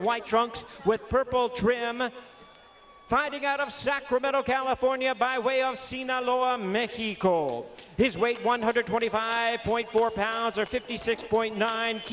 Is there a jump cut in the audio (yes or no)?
yes